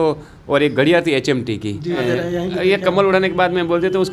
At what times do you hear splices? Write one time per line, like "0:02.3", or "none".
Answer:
0:02.0